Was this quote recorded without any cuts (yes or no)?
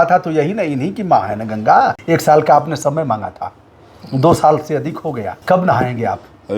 no